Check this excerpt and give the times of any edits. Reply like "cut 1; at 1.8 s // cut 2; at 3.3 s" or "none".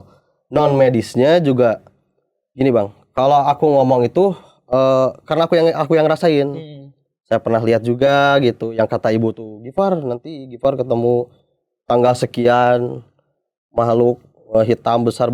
none